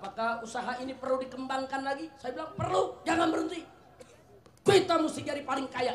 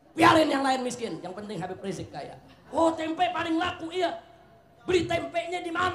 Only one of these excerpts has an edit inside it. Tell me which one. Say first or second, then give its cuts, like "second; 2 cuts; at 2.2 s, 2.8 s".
second; 1 cut; at 2.5 s